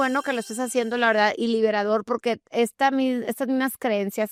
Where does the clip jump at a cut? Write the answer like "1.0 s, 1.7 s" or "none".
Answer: none